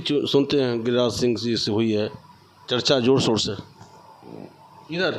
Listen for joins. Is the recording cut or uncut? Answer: uncut